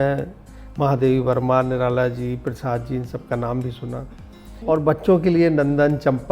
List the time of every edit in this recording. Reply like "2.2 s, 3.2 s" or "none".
4.6 s